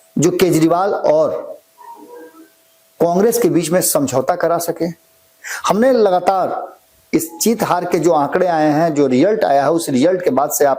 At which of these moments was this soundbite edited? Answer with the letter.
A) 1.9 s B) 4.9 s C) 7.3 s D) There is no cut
D